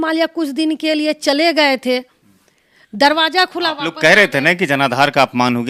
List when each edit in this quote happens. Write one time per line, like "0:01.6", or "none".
none